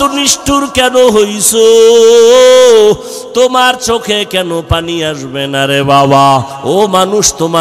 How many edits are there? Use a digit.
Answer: 1